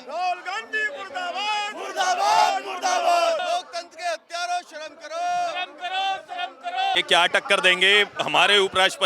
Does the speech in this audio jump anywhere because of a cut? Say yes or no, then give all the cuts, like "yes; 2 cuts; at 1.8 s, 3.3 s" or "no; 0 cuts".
yes; 2 cuts; at 3.4 s, 7.0 s